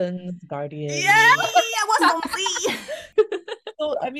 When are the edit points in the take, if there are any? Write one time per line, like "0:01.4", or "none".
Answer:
0:03.0